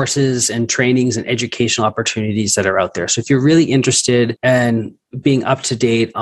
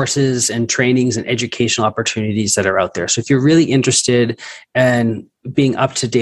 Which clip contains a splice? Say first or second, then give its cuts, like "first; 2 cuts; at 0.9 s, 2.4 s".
first; 1 cut; at 4.4 s